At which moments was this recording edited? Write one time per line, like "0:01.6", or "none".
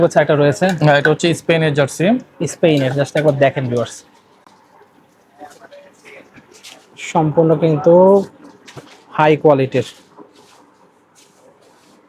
none